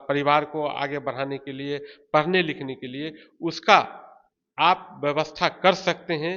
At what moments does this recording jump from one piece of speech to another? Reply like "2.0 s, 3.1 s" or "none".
none